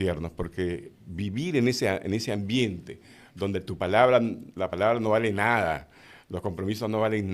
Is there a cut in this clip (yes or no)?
no